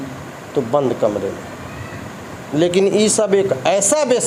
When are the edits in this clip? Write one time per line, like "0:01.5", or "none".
none